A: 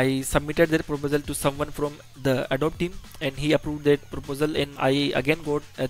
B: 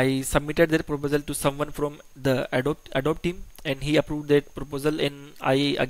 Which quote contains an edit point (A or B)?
A